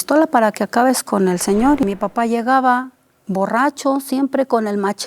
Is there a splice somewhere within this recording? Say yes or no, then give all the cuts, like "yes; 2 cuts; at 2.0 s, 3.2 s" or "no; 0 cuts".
yes; 1 cut; at 1.8 s